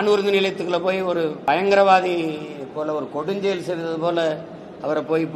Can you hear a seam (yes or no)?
yes